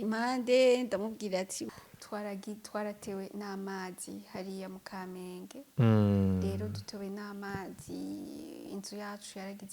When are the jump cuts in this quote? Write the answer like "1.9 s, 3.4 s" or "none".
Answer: 1.7 s